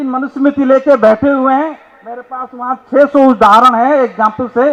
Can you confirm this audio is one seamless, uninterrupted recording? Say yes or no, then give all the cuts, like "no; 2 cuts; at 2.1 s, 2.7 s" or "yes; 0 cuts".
yes; 0 cuts